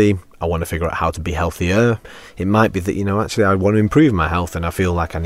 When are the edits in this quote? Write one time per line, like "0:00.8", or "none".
0:02.1

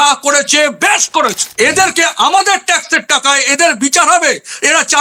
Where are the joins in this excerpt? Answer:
none

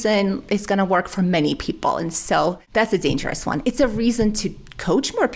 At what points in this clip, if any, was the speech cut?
0:02.6

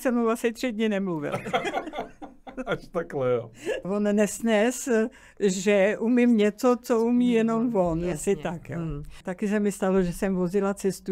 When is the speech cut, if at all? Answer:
0:03.8
0:09.2

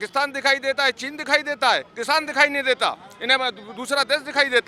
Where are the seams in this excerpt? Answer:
none

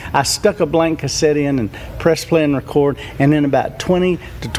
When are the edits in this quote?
none

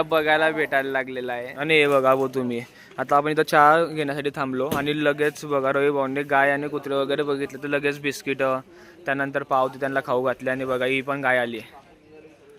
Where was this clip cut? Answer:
0:01.5

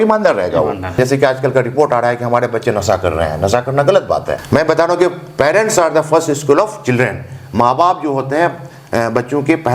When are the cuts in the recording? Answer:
0:01.0
0:04.3

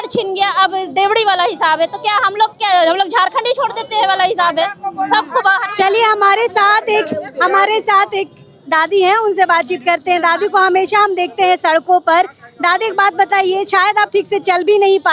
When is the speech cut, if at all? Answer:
none

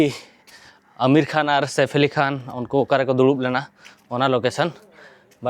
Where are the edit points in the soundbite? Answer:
none

